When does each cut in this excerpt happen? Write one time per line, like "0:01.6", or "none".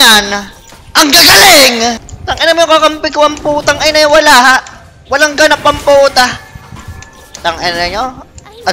none